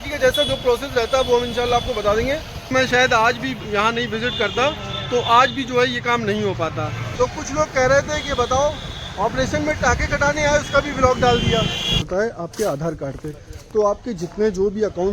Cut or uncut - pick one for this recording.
cut